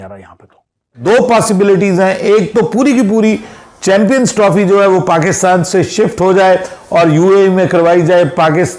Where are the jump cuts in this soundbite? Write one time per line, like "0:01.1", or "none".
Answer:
0:01.0